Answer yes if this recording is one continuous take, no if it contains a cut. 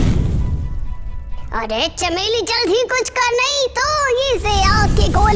yes